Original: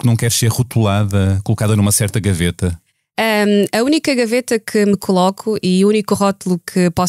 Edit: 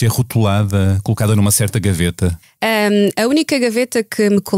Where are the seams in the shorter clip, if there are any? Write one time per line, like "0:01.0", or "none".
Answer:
0:02.5